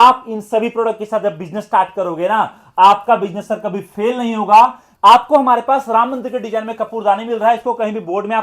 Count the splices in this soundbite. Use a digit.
1